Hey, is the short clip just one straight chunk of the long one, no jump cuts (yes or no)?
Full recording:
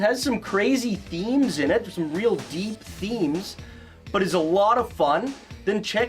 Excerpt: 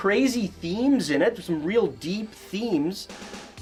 yes